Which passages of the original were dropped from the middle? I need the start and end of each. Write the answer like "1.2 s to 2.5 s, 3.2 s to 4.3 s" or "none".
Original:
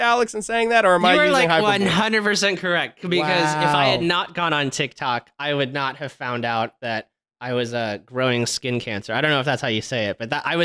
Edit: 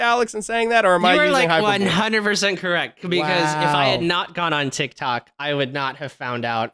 none